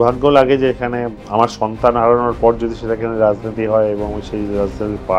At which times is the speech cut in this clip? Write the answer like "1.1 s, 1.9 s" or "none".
1.2 s